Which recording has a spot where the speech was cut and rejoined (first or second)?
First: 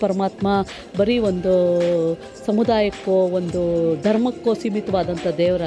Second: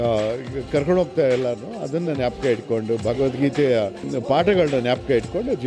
second